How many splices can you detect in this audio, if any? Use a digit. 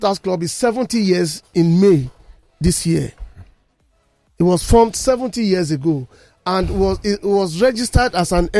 0